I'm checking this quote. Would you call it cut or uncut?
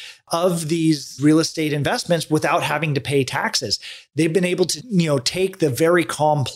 cut